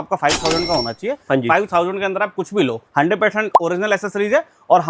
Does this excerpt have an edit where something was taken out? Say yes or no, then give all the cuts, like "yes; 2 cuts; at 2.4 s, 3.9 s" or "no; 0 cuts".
yes; 1 cut; at 2.8 s